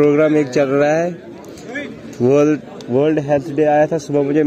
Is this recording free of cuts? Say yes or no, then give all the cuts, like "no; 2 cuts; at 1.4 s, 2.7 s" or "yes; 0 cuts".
yes; 0 cuts